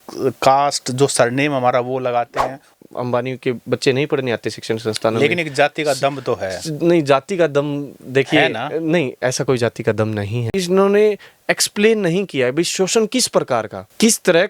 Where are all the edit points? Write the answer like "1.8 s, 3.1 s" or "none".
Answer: 2.7 s, 10.5 s